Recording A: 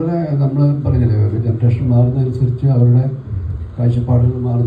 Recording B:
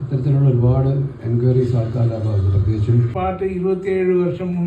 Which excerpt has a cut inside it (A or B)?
B